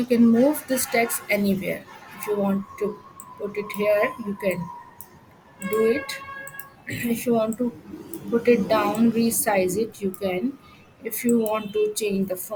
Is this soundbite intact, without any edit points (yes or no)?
yes